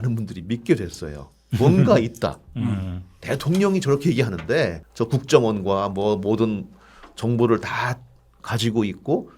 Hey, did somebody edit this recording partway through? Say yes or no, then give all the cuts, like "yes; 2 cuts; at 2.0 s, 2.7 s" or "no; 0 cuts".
yes; 1 cut; at 4.9 s